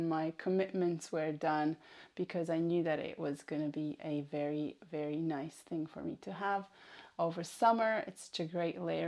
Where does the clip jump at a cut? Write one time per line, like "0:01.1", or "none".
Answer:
none

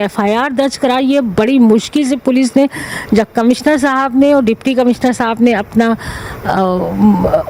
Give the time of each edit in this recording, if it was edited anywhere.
none

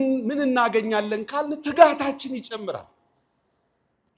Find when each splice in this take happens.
none

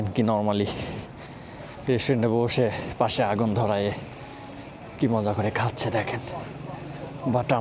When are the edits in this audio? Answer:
none

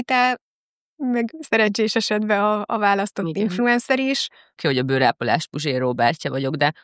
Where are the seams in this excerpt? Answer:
0:04.6

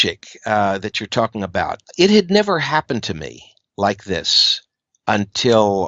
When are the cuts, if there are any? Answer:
0:01.8

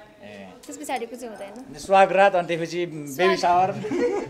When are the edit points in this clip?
none

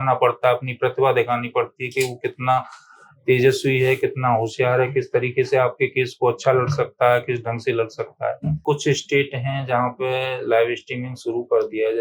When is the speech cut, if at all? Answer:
0:08.6

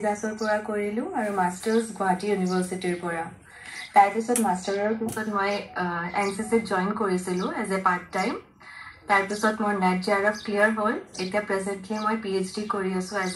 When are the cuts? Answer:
none

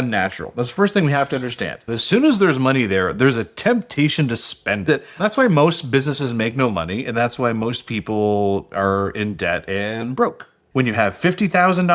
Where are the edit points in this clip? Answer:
0:04.8
0:10.6

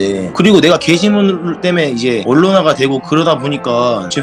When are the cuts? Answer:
none

